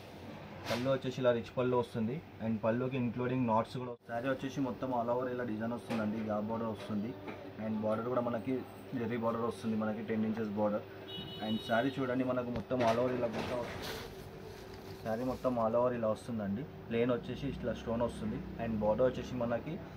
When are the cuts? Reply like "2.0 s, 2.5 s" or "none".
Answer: 3.8 s, 13.6 s